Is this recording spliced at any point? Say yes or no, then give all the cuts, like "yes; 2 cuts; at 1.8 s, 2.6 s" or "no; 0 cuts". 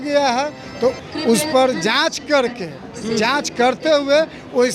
yes; 1 cut; at 1.0 s